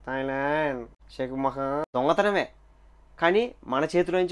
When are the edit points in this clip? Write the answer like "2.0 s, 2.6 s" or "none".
1.9 s